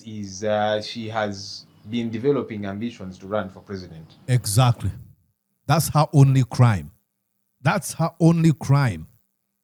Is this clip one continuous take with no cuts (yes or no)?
yes